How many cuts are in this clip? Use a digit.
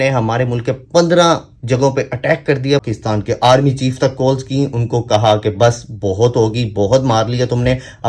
1